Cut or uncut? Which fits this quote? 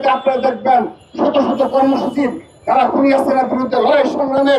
uncut